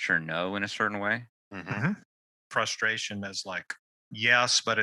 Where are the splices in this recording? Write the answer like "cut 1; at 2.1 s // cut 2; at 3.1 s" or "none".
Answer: cut 1; at 2.3 s